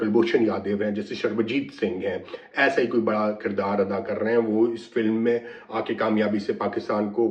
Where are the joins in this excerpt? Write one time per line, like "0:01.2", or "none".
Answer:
none